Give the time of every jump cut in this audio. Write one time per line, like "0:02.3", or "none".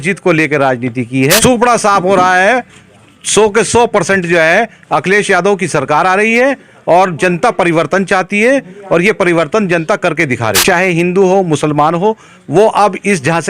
0:01.4
0:10.6